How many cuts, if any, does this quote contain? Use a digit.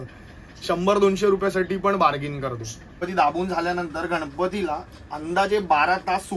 1